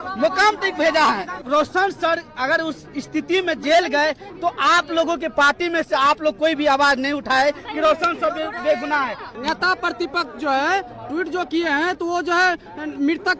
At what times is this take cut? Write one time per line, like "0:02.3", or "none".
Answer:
0:01.4
0:09.3